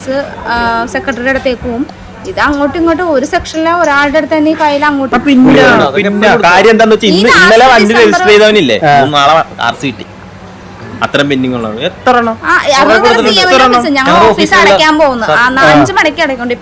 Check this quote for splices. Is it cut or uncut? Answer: cut